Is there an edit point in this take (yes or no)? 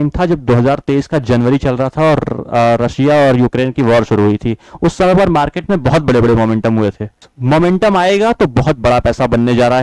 yes